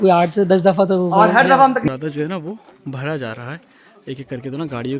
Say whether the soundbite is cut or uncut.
cut